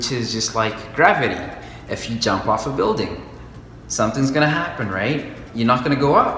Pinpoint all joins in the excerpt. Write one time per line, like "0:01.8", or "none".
none